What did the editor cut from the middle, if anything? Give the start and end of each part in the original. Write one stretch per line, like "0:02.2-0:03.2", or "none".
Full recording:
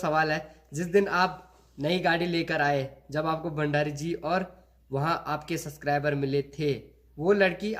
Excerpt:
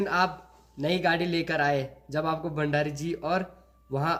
none

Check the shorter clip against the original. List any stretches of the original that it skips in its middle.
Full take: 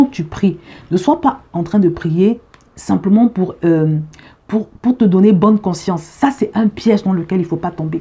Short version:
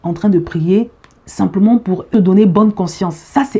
0:03.6-0:05.0

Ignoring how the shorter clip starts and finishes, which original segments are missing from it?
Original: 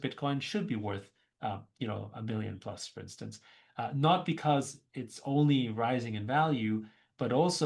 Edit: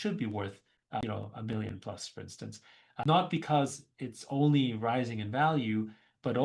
0:01.5-0:01.8
0:03.8-0:04.0

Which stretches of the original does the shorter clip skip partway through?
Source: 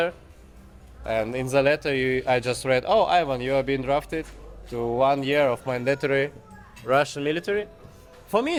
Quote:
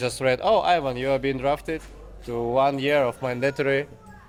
none

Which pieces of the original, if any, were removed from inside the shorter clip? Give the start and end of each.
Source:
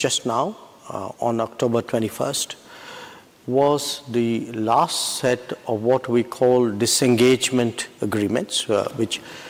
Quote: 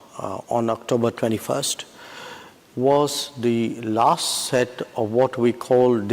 none

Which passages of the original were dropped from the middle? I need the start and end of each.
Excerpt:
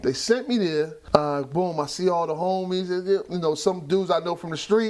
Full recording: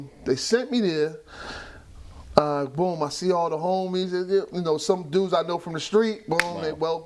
0:01.2-0:02.2

